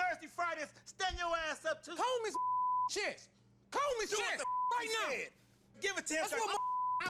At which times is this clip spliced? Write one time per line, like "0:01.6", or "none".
none